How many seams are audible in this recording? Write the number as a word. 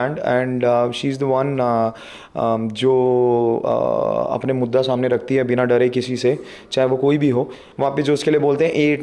one